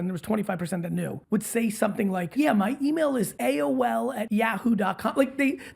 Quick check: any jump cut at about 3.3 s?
yes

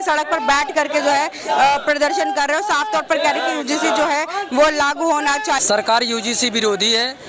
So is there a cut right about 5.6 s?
yes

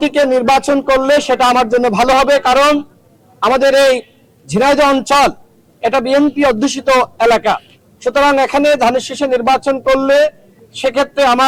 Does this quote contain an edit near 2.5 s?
no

